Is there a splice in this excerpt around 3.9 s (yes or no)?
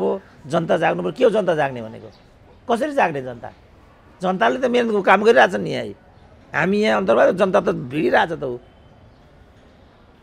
no